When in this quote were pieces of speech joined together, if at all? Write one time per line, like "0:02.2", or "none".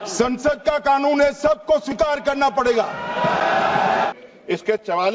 0:04.1